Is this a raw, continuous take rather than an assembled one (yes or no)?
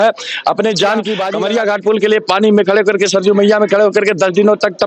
no